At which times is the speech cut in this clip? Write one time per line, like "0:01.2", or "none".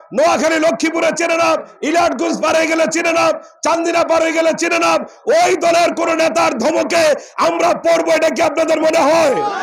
none